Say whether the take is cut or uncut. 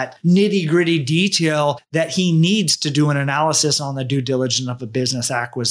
cut